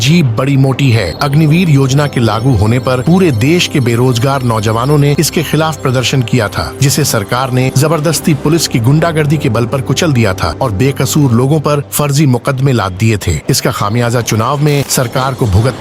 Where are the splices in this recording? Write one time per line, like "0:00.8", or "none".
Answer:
0:01.1